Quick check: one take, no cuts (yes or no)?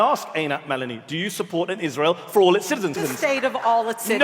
no